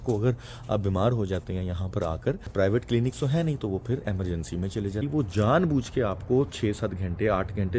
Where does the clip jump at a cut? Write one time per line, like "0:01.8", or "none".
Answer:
0:02.5
0:05.1